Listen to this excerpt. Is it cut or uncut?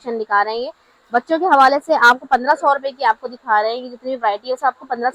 uncut